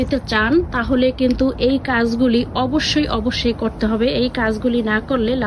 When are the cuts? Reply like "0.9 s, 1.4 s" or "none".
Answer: none

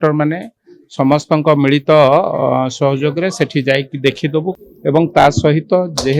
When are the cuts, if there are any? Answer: 4.5 s

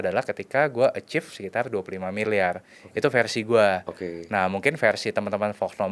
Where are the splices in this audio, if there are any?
none

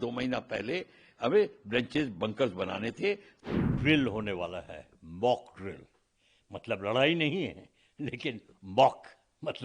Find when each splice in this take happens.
3.3 s

